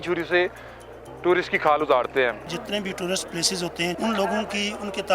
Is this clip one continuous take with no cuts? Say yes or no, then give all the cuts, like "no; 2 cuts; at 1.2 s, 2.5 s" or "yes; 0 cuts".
no; 2 cuts; at 2.5 s, 4.0 s